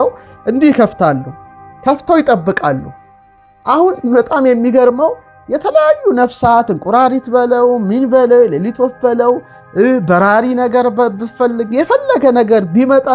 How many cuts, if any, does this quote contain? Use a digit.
0